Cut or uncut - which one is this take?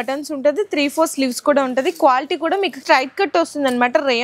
cut